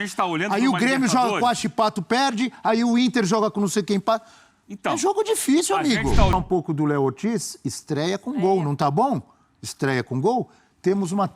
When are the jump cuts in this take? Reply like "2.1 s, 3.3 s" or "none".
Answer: 6.3 s

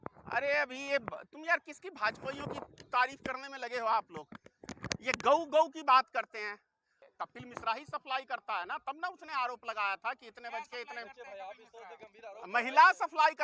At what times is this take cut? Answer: 6.9 s

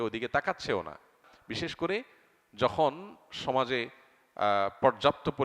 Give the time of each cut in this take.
1.3 s

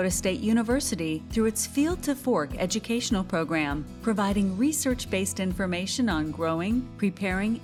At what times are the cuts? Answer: none

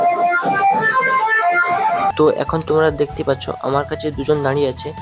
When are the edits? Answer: 2.1 s

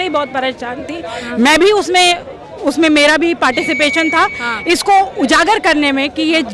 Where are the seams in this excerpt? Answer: none

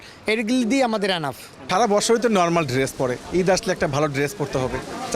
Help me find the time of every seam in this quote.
1.6 s

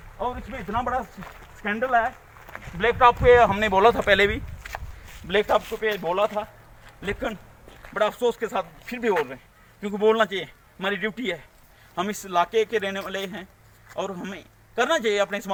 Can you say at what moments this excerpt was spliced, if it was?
none

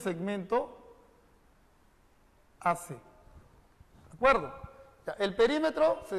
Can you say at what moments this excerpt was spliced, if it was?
4.5 s

